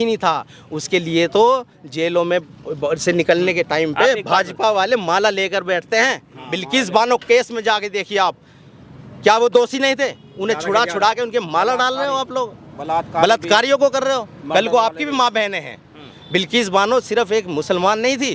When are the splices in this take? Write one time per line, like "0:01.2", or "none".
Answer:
none

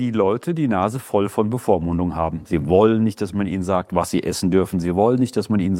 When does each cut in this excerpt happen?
0:02.4

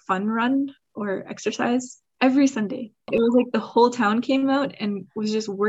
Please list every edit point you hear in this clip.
0:03.0

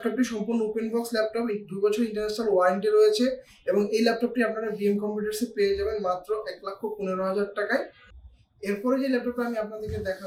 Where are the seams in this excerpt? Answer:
none

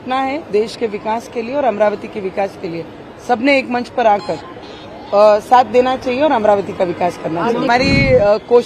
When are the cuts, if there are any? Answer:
0:07.7

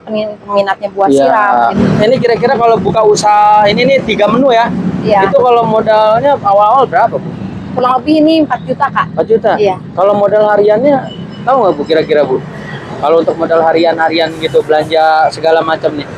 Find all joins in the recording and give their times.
0:01.8

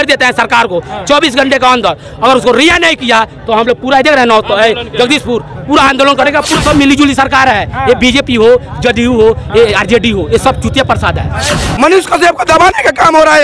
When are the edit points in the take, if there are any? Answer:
0:06.6
0:11.6

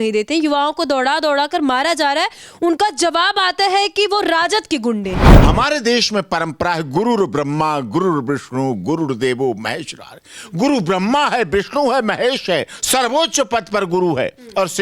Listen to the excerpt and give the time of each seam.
0:05.3

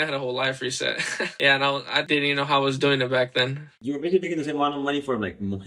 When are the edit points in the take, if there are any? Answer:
0:01.3
0:02.0
0:03.8

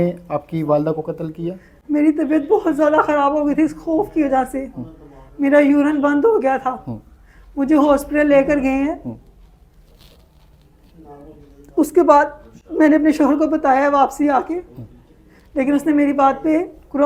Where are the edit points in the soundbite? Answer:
none

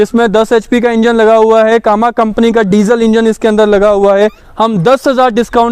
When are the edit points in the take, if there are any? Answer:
0:04.4

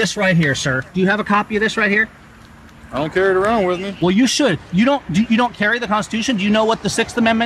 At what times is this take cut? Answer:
none

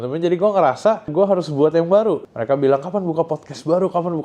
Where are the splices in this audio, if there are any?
0:01.1
0:02.2

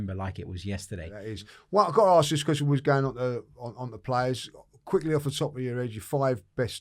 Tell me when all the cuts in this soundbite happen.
0:01.2

